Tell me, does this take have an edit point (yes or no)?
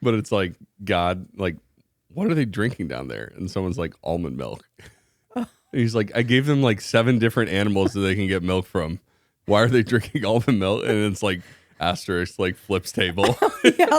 no